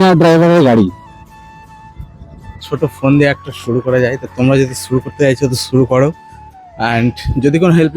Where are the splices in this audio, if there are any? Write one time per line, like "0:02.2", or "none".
0:02.5